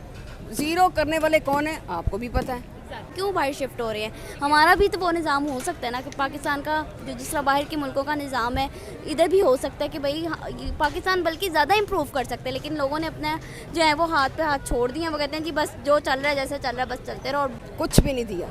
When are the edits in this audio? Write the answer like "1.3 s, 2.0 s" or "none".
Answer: 3.1 s, 17.6 s